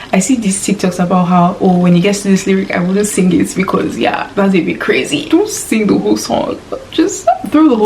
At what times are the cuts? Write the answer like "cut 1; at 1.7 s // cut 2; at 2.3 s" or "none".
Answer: cut 1; at 5.2 s